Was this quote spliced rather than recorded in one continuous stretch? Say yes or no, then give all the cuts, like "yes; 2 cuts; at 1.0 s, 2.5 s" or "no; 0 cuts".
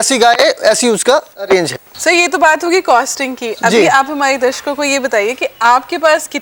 no; 0 cuts